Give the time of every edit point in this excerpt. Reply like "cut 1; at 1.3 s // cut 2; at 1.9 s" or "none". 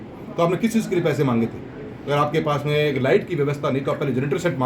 none